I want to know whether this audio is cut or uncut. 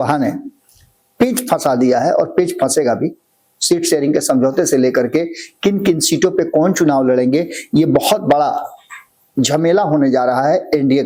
uncut